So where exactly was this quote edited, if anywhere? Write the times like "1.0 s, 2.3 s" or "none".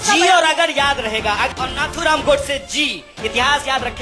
1.5 s